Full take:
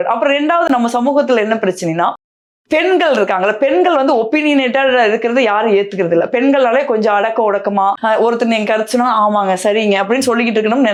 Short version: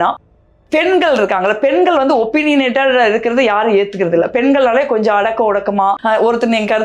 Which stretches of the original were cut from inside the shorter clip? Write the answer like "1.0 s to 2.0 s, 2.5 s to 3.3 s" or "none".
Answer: none